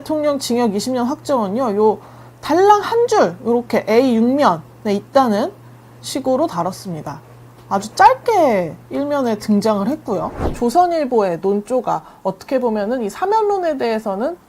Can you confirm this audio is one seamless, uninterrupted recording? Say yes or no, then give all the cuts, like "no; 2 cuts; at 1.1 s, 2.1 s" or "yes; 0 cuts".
no; 1 cut; at 10.4 s